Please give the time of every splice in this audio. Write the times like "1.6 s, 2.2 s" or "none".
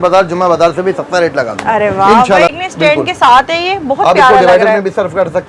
2.5 s